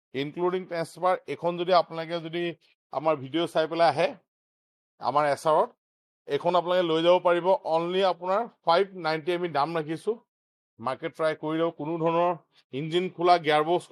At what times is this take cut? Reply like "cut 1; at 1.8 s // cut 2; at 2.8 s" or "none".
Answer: none